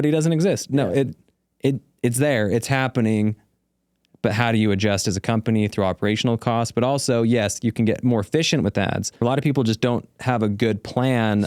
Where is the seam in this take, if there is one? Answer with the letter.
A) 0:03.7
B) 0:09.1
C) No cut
B